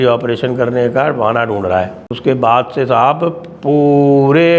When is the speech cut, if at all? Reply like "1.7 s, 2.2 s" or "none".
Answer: 2.0 s